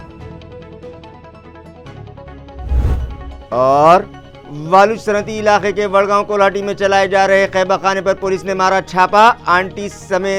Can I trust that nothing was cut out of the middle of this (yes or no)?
no